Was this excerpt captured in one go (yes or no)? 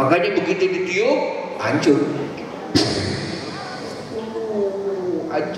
yes